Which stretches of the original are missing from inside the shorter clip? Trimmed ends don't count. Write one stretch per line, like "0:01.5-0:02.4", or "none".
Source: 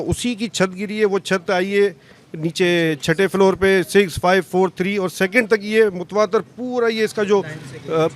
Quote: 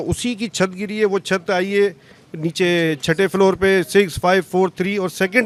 none